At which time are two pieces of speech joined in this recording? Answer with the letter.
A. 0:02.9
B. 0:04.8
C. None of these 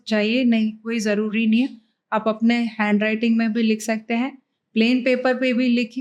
C